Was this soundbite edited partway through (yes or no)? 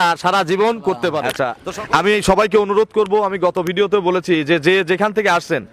yes